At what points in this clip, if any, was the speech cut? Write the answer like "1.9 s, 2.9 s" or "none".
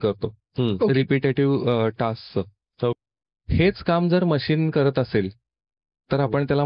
2.9 s